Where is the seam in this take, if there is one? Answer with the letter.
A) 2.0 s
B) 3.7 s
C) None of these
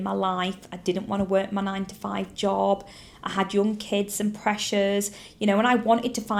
C